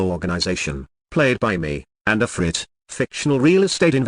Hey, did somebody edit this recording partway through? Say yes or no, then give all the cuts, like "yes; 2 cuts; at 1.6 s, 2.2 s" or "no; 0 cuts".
yes; 1 cut; at 0.9 s